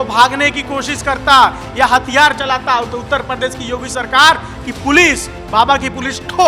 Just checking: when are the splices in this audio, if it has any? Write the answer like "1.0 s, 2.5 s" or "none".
none